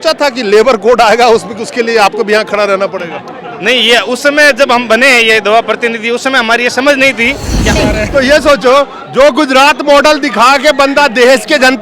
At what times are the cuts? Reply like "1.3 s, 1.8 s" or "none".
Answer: 7.8 s